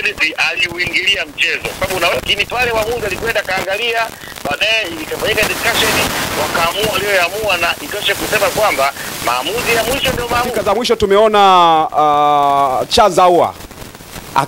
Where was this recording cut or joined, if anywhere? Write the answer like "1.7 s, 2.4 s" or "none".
2.1 s, 10.6 s